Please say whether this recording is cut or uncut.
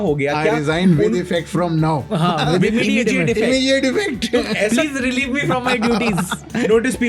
uncut